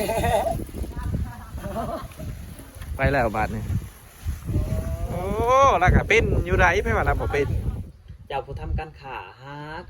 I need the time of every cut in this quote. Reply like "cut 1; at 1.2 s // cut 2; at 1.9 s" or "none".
cut 1; at 1.0 s // cut 2; at 7.8 s